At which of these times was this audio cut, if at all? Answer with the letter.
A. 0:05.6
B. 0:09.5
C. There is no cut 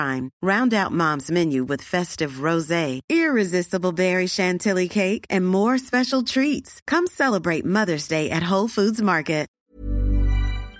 B